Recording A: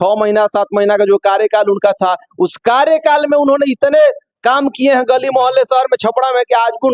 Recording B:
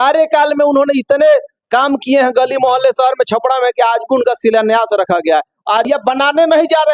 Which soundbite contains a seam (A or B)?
B